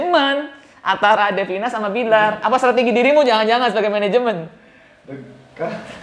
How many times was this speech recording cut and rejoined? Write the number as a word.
zero